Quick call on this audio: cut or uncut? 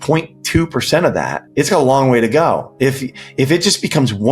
cut